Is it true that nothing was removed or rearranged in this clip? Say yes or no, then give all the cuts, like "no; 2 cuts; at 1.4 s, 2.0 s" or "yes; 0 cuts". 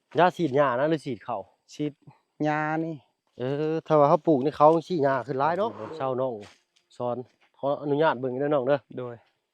no; 1 cut; at 5.7 s